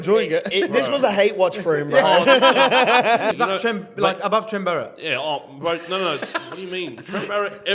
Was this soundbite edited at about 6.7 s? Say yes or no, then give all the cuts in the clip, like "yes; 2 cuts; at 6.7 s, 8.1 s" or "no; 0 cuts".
no; 1 cut; at 3.3 s